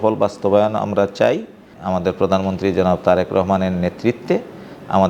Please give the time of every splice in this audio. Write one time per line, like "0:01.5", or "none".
0:01.7